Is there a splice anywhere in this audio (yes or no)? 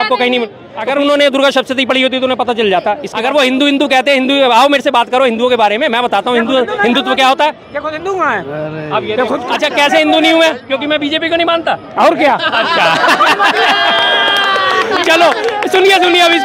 yes